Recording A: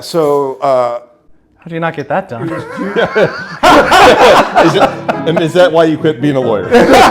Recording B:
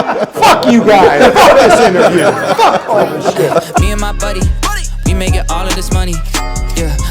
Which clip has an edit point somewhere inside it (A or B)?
B